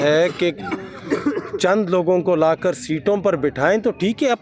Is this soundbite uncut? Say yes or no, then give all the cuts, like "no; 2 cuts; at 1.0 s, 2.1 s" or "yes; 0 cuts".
yes; 0 cuts